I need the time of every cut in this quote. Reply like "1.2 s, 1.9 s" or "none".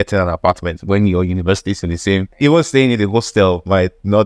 2.3 s